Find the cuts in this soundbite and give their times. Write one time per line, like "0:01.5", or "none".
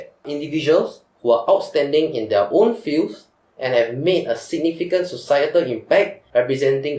none